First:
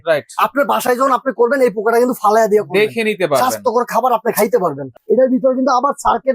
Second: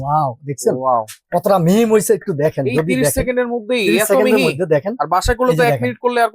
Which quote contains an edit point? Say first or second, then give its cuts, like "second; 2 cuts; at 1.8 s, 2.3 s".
first; 1 cut; at 4.9 s